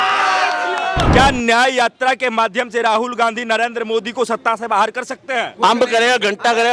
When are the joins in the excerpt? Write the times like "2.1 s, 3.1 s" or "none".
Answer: 1.0 s